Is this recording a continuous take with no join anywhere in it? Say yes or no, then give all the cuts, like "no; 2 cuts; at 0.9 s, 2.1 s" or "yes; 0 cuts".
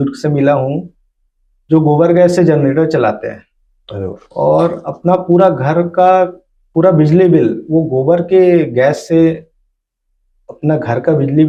yes; 0 cuts